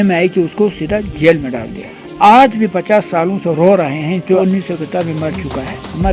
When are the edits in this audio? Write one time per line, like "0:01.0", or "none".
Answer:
0:02.0
0:04.4